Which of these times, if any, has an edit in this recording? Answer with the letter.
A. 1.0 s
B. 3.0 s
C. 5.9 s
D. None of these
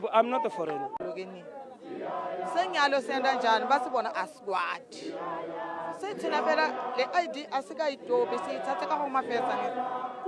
A